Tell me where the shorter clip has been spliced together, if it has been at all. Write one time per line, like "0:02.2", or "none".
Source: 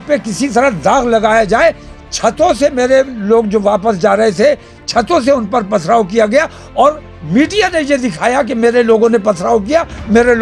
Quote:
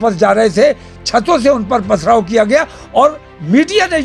none